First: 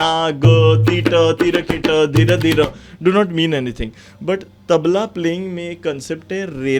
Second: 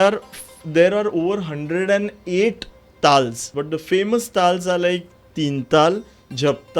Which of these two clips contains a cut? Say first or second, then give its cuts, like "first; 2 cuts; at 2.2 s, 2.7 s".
second; 1 cut; at 3.5 s